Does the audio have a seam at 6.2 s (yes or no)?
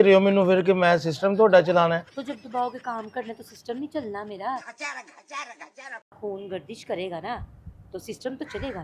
yes